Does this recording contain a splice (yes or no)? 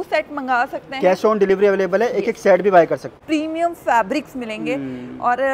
yes